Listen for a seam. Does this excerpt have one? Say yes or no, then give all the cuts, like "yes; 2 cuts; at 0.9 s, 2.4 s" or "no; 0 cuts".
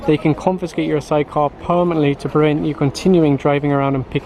no; 0 cuts